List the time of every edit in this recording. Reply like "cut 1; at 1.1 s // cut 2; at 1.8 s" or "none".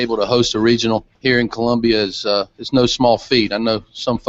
cut 1; at 1.1 s